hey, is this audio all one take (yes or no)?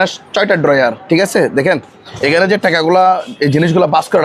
yes